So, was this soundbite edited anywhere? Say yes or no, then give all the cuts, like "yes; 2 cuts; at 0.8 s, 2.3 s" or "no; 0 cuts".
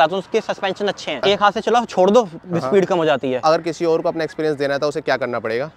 yes; 2 cuts; at 1.2 s, 3.4 s